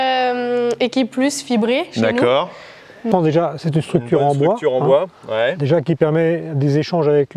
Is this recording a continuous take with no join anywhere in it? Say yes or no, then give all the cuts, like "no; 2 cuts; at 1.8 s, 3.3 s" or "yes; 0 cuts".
no; 1 cut; at 3.1 s